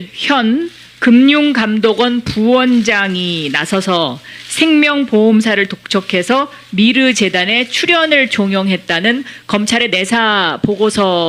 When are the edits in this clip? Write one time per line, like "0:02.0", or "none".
0:08.6